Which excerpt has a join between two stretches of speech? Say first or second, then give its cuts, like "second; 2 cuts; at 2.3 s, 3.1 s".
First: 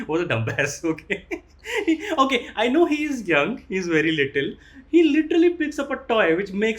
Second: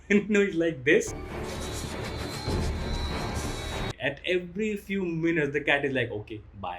second; 1 cut; at 3.9 s